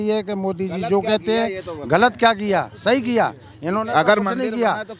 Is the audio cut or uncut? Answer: uncut